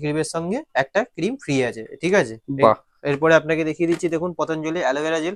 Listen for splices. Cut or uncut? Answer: uncut